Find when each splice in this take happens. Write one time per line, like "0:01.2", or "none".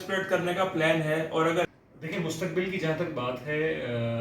0:01.7

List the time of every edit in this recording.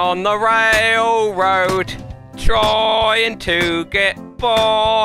none

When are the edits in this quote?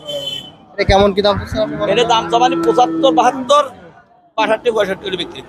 none

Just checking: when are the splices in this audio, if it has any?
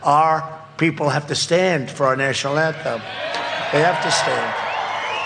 none

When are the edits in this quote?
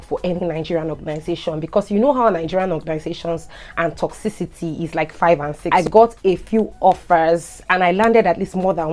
0:05.5

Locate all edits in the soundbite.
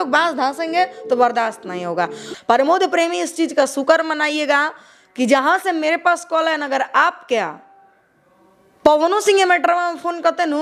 0:02.3

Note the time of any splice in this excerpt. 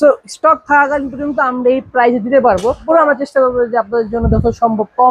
0:02.8

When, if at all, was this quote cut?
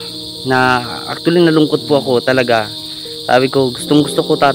none

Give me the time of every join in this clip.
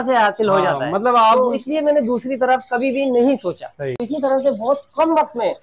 0:04.0

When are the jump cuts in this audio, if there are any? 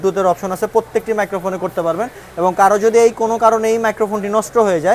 none

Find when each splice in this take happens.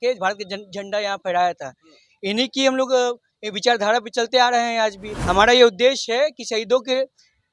0:05.1

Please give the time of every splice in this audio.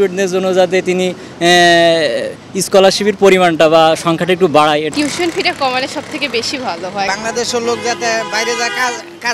0:04.9
0:07.1

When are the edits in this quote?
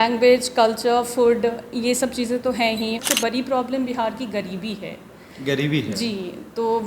0:03.0

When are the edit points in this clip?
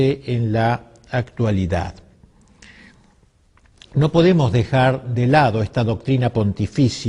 0:01.5

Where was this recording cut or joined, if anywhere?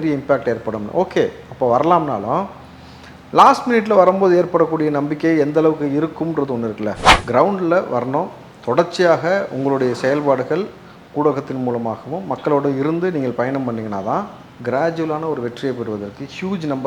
0:07.1

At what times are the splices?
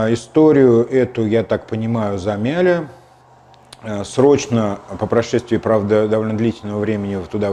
none

